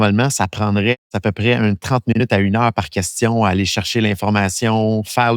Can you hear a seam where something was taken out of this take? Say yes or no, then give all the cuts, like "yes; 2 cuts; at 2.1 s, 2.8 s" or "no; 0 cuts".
yes; 1 cut; at 1.1 s